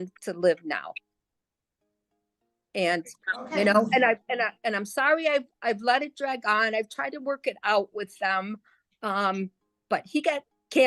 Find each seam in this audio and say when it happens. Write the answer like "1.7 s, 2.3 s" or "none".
none